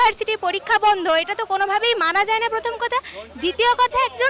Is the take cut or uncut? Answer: uncut